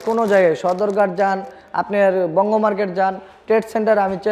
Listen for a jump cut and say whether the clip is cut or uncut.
uncut